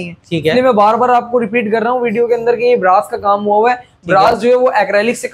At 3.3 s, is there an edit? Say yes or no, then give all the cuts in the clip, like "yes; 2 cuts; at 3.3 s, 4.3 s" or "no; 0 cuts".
no; 0 cuts